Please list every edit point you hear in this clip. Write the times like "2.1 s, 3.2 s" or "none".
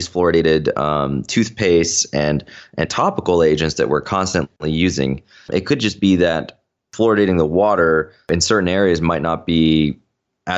5.5 s, 6.9 s, 8.3 s